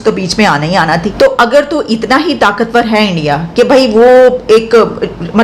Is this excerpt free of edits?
no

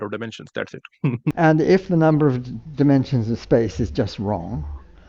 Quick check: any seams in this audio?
yes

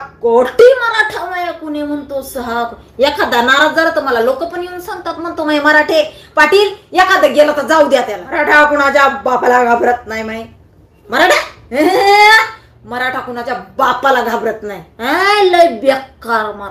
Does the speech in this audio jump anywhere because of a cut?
yes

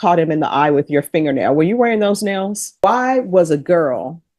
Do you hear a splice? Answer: yes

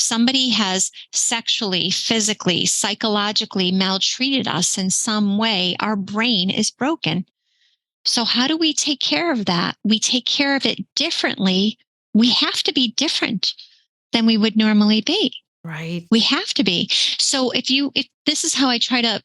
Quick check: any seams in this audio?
no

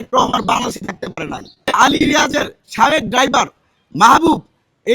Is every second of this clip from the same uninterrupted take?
no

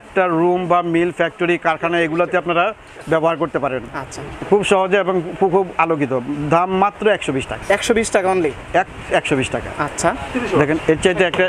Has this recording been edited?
no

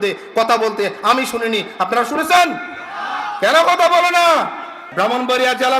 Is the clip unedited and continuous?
no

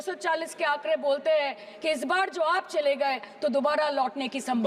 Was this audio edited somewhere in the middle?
no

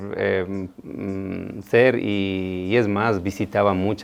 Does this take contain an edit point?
no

